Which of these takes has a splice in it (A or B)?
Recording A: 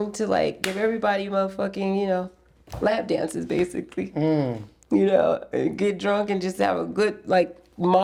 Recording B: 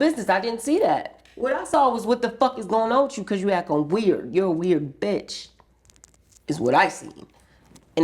B